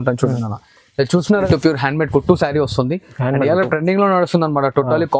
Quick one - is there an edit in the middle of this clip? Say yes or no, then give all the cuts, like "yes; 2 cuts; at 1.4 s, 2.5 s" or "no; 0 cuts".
yes; 1 cut; at 1.5 s